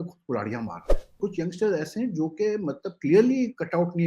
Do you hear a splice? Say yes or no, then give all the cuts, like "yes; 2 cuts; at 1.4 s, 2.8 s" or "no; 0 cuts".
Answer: yes; 1 cut; at 1.2 s